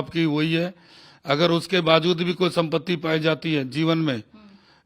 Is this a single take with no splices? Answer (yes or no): yes